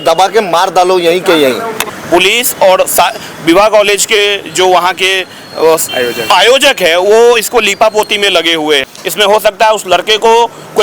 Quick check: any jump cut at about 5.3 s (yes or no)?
no